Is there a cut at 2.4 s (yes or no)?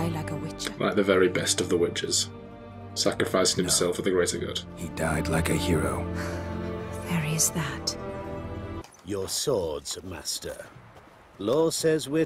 no